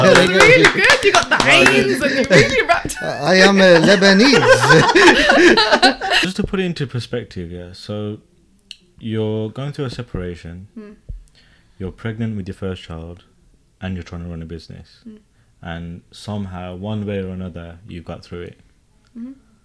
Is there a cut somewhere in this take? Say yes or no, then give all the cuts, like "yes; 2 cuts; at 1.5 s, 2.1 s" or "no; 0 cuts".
yes; 1 cut; at 6.2 s